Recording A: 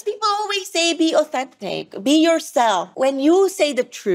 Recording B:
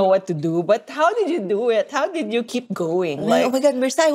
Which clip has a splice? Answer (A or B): A